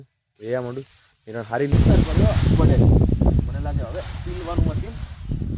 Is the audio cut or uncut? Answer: cut